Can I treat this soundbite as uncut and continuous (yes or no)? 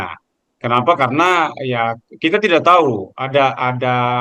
yes